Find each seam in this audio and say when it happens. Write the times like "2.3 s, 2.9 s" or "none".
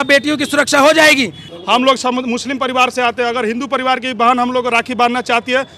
1.4 s